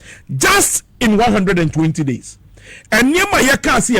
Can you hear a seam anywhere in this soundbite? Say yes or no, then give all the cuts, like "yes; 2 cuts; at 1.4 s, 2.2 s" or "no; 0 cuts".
no; 0 cuts